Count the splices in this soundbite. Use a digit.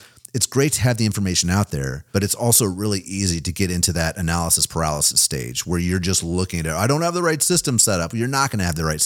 1